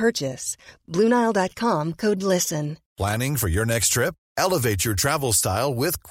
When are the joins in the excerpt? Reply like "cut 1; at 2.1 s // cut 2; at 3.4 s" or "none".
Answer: cut 1; at 2.8 s

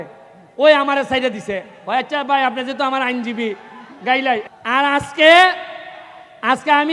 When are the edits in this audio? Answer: cut 1; at 4.4 s

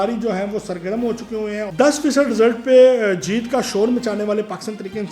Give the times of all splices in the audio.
cut 1; at 1.7 s

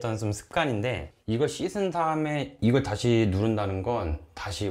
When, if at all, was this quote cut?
cut 1; at 1.1 s

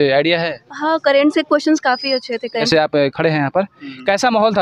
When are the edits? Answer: cut 1; at 2.6 s

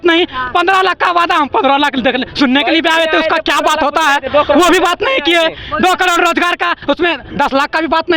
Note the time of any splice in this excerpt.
none

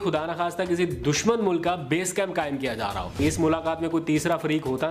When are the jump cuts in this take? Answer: cut 1; at 3.2 s

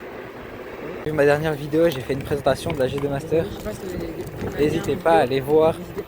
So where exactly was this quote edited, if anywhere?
cut 1; at 1.1 s

